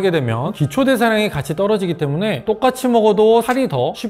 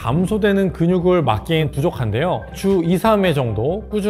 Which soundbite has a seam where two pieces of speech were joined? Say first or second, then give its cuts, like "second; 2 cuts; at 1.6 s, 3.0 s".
second; 1 cut; at 1.6 s